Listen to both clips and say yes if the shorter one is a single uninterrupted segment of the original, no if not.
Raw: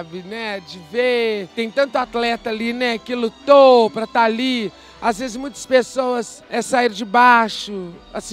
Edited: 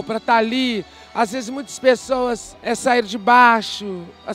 yes